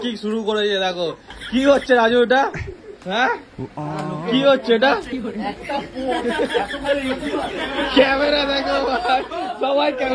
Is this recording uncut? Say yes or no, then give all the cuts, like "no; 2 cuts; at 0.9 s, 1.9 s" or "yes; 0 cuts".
no; 2 cuts; at 3.7 s, 5.3 s